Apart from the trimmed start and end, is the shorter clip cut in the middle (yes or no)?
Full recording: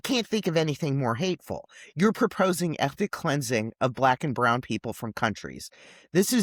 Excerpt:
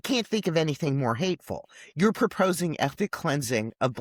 no